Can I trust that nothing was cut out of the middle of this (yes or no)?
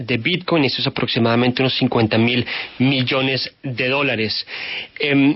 yes